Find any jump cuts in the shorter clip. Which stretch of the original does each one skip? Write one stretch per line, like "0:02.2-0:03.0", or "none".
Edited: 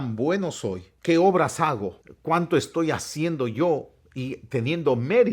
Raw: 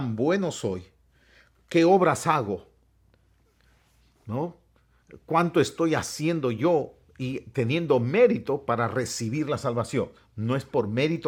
0:00.9-0:01.5
0:02.7-0:05.1

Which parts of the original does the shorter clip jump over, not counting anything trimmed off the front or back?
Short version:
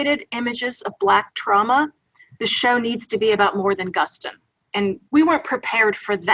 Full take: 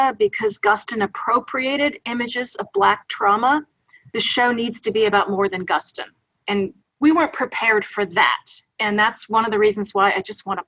0:06.8-0:06.9

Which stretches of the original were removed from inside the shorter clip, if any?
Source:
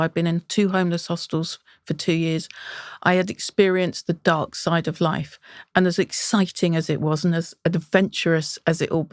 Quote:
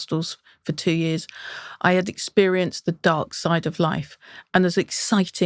none

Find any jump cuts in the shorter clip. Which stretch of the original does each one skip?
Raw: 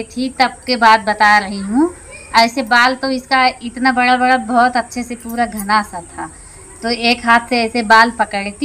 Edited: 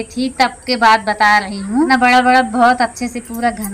0:01.9-0:03.8

